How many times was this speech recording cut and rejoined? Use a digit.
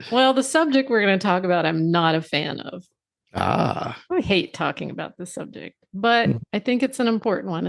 1